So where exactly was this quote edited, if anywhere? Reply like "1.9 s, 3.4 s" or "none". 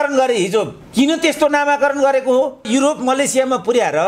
2.7 s